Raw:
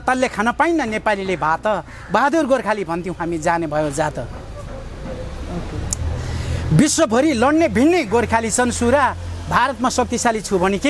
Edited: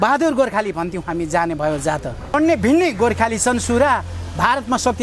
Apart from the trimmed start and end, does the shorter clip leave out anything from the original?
yes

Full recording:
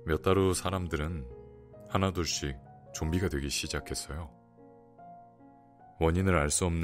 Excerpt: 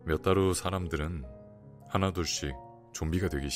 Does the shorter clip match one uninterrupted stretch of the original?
yes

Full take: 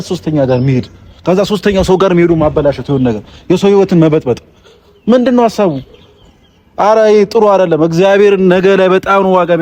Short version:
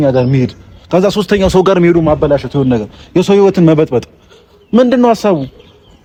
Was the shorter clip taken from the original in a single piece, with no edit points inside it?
yes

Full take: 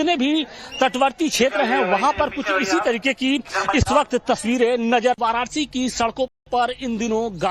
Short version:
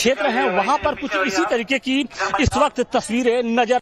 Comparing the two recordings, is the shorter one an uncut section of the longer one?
yes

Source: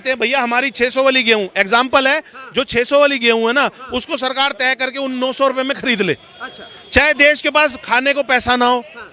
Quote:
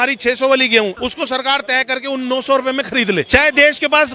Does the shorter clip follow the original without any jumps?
no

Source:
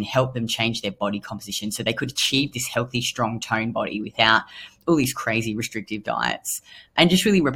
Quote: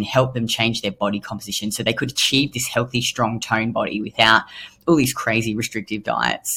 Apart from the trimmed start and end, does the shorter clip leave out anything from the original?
no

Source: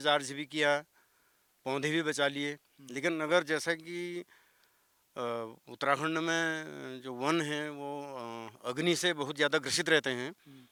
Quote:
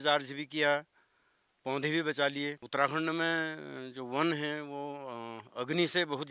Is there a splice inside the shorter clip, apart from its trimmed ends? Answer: yes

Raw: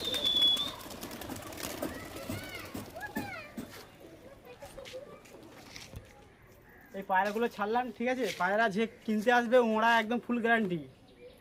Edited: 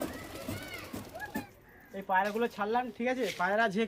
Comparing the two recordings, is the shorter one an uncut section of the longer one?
no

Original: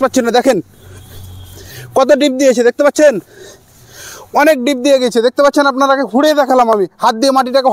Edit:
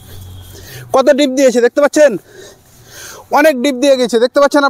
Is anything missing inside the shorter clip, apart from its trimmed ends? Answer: no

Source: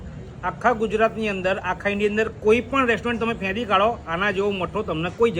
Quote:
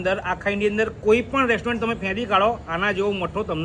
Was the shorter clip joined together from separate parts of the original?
no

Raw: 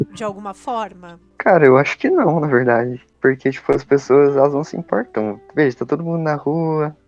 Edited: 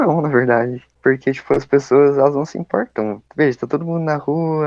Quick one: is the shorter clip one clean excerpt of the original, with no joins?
yes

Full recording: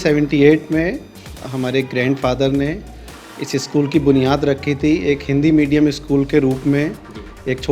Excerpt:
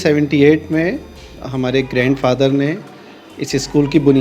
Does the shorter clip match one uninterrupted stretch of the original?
yes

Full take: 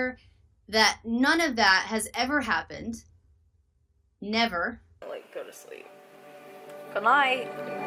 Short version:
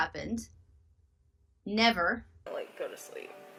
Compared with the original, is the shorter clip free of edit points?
yes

